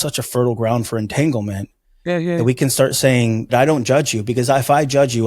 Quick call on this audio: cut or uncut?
cut